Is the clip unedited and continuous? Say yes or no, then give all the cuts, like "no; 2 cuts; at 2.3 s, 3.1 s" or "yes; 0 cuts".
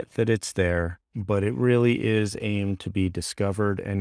yes; 0 cuts